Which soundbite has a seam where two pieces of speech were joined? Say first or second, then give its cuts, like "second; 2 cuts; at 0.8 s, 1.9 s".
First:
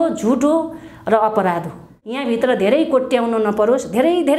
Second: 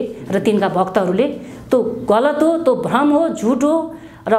first; 1 cut; at 2.2 s